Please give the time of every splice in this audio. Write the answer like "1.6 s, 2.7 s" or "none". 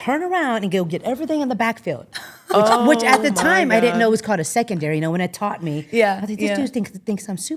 none